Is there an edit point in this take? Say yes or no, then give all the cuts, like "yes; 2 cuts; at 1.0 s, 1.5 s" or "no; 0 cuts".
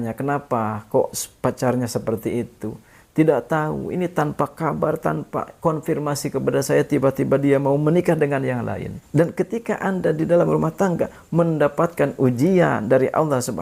yes; 1 cut; at 9.0 s